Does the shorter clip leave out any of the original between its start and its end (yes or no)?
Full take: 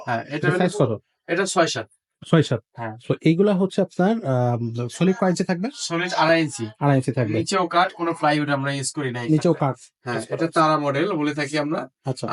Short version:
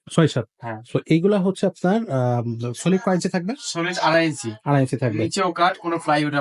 no